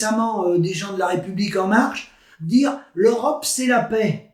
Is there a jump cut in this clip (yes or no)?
no